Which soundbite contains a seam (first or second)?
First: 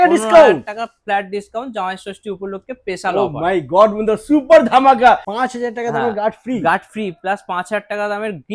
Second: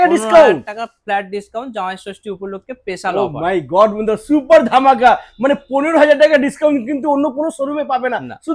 first